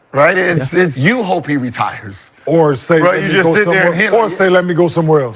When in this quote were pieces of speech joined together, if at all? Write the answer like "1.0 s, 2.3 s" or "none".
1.0 s